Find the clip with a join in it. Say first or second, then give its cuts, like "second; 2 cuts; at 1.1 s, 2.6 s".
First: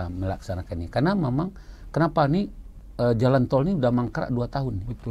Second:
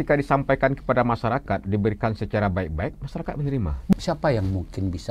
second; 1 cut; at 3.9 s